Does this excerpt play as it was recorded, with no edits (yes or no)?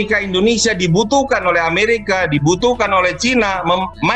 yes